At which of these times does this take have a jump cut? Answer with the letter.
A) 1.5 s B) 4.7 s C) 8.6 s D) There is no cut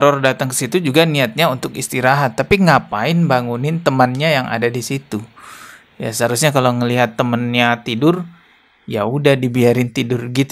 D